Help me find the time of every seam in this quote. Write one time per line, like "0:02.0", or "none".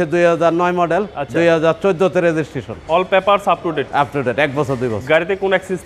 none